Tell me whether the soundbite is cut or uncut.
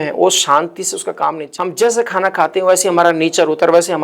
cut